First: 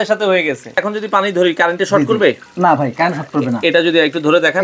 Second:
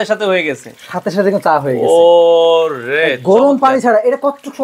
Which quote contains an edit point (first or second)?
first